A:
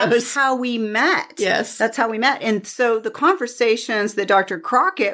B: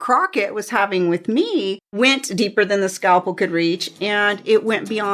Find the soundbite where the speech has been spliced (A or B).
B